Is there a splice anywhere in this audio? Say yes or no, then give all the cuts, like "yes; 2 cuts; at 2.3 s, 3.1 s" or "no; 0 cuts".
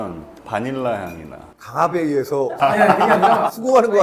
no; 0 cuts